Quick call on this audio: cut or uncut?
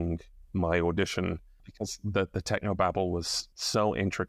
cut